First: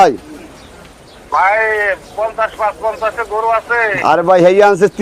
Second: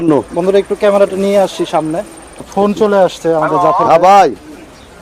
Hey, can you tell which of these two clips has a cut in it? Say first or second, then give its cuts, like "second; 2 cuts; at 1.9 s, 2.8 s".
second; 1 cut; at 2.3 s